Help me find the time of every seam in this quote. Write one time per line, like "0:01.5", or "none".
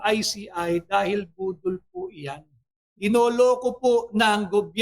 0:02.8

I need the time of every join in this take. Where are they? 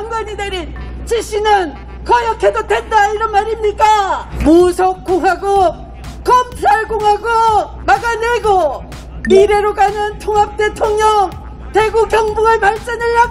0:04.3
0:07.8

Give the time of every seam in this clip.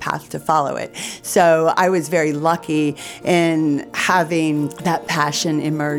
0:03.9
0:04.8

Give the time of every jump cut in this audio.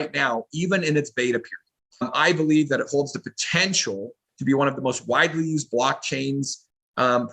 0:02.1

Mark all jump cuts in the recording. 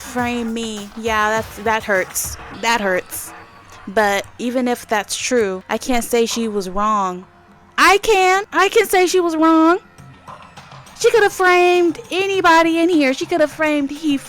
0:04.3
0:05.6
0:08.5

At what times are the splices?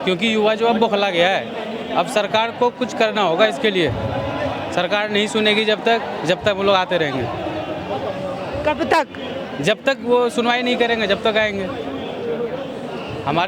none

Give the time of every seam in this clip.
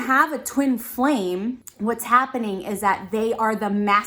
0:01.7

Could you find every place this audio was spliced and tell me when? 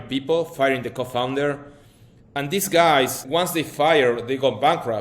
0:03.2

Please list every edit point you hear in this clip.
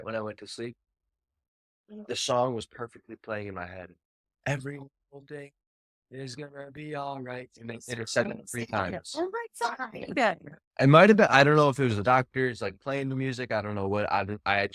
none

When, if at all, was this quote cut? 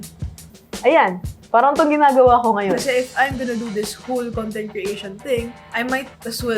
0:02.8

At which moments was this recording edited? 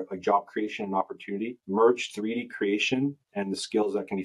none

